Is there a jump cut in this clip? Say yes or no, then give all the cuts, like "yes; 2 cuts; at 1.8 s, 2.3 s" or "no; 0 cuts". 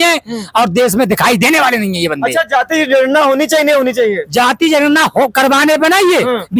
no; 0 cuts